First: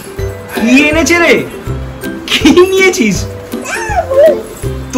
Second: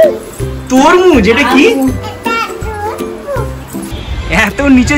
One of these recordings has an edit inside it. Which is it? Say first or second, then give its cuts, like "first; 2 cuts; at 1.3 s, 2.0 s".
second; 1 cut; at 3.9 s